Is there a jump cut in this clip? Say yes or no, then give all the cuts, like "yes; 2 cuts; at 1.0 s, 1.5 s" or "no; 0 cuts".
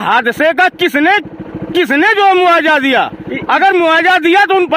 no; 0 cuts